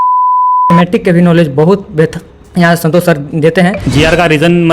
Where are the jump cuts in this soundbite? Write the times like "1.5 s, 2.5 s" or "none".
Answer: 3.8 s